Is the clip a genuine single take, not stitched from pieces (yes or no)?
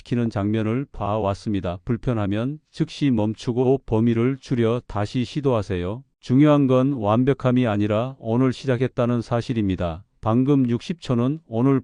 yes